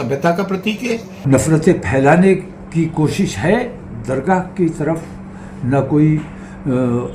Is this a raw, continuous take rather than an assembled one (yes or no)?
no